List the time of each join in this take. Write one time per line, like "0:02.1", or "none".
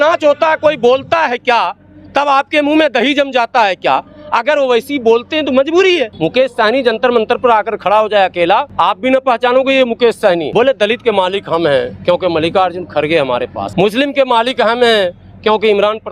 0:06.2
0:08.7
0:10.5
0:13.6